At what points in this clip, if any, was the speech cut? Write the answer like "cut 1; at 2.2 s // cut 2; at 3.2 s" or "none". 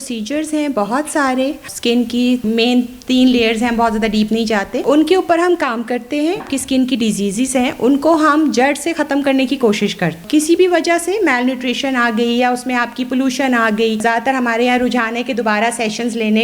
cut 1; at 2.0 s // cut 2; at 4.8 s // cut 3; at 6.4 s // cut 4; at 10.2 s // cut 5; at 14.0 s